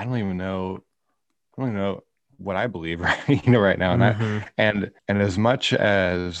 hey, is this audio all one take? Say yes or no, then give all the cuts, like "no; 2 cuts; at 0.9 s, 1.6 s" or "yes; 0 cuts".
no; 1 cut; at 5.0 s